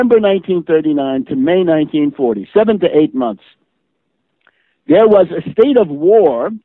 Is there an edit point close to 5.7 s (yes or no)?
yes